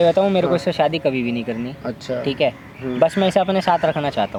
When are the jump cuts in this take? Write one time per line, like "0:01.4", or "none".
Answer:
none